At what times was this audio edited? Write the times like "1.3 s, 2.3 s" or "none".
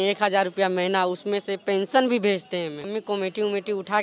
2.9 s